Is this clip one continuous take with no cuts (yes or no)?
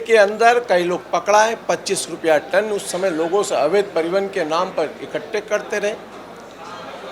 yes